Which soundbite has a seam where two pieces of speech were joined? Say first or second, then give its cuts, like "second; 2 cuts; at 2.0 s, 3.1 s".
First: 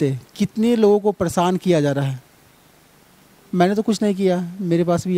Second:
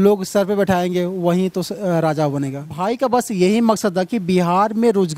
second; 1 cut; at 2.7 s